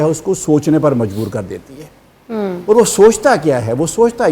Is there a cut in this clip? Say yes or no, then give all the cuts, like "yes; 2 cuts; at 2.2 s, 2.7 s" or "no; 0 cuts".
no; 0 cuts